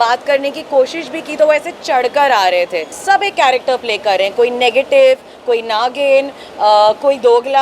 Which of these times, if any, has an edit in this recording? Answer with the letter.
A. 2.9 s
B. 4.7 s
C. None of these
A